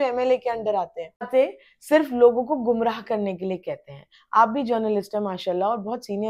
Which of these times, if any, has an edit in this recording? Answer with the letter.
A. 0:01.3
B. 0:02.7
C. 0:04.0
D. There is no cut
A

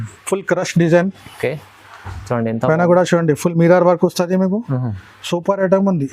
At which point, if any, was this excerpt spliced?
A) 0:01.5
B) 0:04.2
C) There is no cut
C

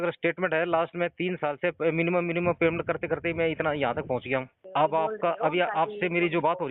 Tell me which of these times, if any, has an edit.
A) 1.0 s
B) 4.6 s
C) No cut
B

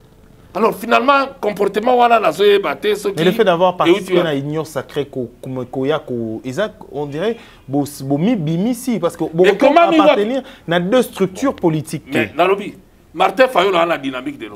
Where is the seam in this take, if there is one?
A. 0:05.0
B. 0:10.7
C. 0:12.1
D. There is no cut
D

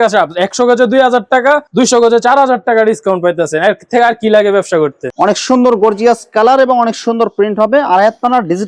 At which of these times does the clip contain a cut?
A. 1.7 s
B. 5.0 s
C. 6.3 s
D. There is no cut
B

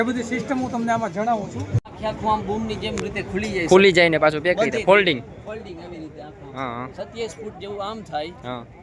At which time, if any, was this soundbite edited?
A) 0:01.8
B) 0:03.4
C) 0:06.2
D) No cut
A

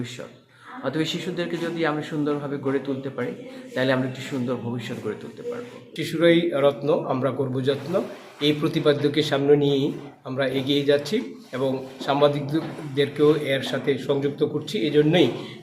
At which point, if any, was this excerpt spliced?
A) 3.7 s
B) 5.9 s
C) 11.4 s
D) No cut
B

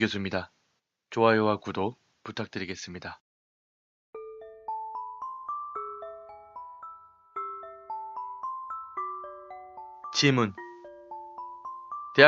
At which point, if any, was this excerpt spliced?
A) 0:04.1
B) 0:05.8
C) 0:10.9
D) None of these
D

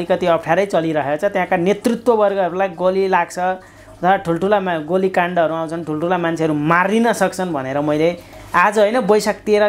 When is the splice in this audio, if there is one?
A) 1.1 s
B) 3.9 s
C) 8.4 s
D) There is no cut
D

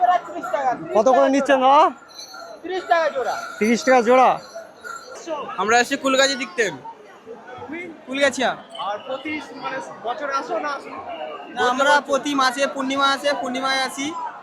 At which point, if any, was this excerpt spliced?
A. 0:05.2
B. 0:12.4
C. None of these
A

